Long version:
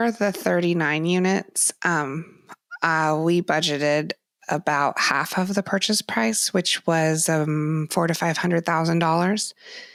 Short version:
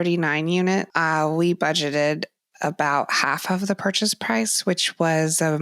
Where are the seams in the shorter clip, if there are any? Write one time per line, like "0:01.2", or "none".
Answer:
0:00.9